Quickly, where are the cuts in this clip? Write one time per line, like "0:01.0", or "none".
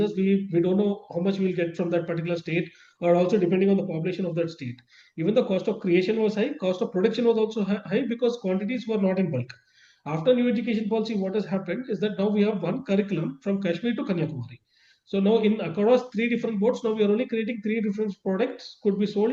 none